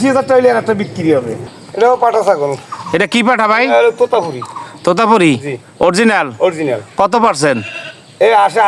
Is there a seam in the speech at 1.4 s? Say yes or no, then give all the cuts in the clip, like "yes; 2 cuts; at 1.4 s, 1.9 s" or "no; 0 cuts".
yes; 1 cut; at 1.4 s